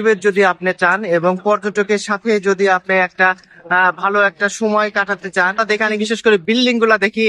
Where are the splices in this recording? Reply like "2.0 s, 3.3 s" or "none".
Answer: 5.6 s